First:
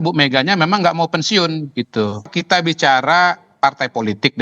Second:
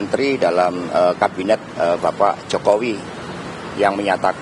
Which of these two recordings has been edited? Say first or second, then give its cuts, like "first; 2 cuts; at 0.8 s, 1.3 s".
first; 1 cut; at 2.3 s